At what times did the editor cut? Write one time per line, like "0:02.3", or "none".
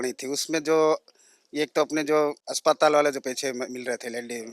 0:02.5

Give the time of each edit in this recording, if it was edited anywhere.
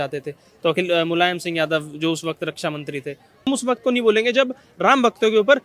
0:03.5

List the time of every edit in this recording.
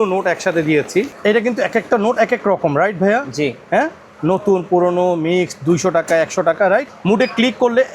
0:01.1
0:06.9

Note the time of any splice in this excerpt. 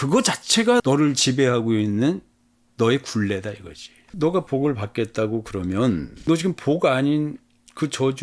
0:03.9

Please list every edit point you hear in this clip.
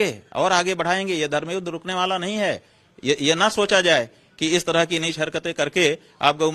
0:03.5

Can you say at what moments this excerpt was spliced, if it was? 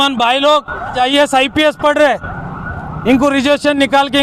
0:00.9

